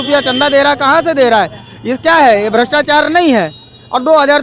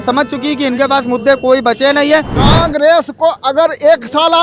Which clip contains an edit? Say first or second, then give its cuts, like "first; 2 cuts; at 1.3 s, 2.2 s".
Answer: second; 1 cut; at 2.4 s